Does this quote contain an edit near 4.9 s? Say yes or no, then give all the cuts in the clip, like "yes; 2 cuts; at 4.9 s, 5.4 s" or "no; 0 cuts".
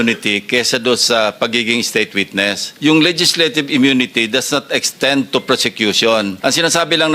no; 2 cuts; at 2.7 s, 6.3 s